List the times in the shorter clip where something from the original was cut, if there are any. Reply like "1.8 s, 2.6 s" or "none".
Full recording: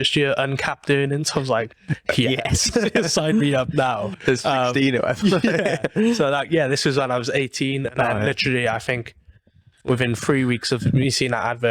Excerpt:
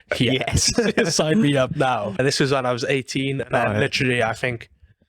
2.2 s